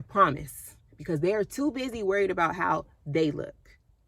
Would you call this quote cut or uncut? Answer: uncut